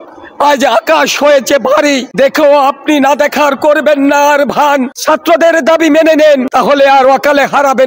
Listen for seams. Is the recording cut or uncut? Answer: cut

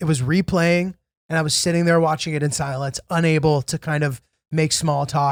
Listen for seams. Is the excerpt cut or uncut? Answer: uncut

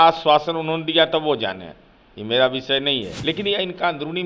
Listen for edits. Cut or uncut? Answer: cut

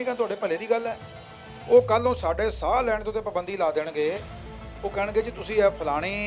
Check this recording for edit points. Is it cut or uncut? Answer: uncut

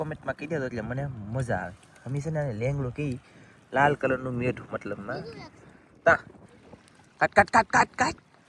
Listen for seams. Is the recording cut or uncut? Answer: uncut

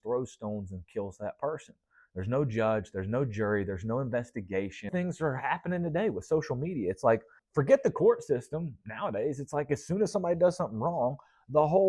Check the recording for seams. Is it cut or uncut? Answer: cut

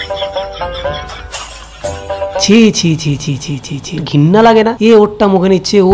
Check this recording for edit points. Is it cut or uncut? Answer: cut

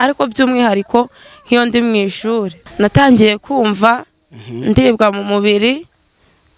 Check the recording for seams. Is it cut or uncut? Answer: cut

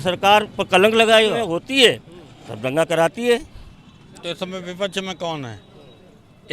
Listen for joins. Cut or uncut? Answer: cut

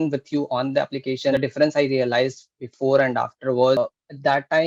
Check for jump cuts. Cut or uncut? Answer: cut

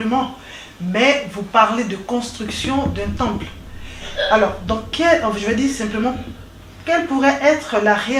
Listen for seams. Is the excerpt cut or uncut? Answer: uncut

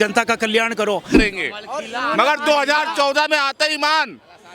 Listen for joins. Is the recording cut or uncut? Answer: cut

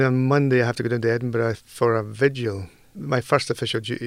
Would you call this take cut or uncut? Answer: cut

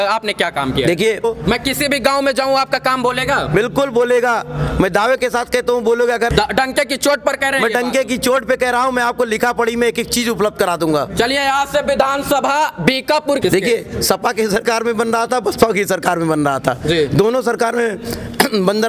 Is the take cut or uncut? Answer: cut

